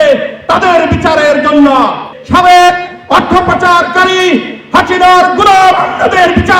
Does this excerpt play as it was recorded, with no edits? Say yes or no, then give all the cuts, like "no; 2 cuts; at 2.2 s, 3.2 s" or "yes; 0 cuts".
no; 1 cut; at 2.1 s